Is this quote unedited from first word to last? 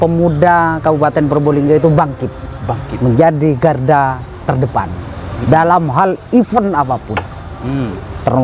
yes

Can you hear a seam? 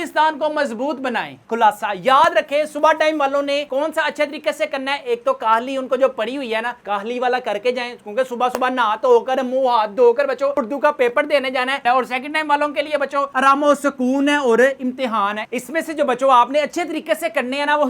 yes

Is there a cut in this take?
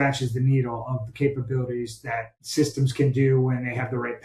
yes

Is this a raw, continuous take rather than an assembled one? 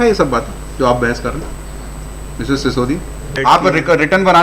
no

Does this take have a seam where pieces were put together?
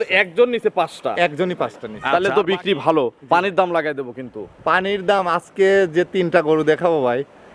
yes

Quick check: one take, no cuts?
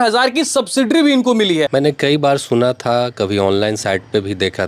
no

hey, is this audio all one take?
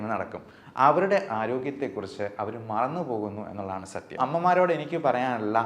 no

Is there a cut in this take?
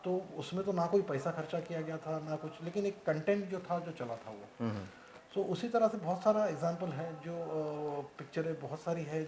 no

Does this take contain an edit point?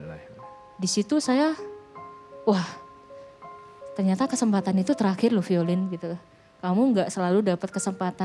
no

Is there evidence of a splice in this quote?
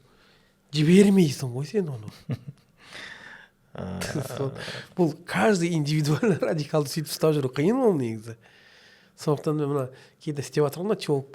no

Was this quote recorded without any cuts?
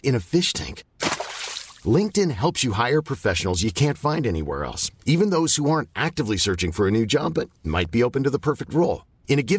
yes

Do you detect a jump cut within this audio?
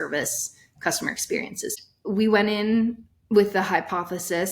yes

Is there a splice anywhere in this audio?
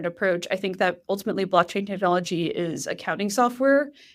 no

